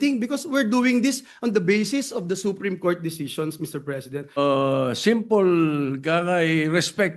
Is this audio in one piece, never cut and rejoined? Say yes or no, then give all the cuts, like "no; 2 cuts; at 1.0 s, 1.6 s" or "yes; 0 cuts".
no; 1 cut; at 4.4 s